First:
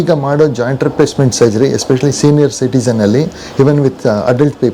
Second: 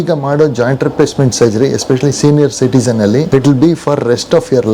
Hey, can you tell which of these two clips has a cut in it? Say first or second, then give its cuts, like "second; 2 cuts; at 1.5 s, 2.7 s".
second; 1 cut; at 3.3 s